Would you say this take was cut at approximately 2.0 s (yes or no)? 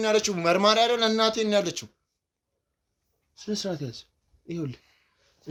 no